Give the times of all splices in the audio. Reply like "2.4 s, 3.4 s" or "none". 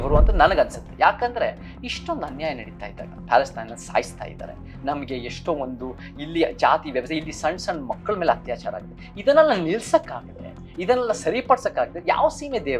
none